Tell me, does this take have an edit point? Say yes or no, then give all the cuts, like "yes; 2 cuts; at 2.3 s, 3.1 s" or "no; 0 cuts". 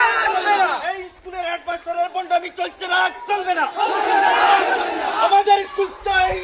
no; 0 cuts